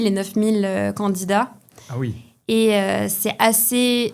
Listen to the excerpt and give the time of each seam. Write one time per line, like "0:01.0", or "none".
none